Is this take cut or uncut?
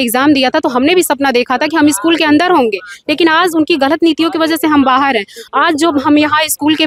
uncut